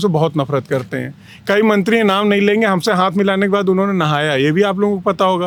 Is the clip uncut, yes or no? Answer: yes